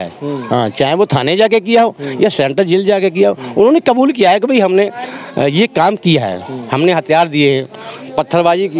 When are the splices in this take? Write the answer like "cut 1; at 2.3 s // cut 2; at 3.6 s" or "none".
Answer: none